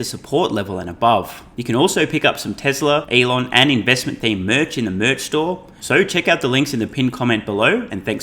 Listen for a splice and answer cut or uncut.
cut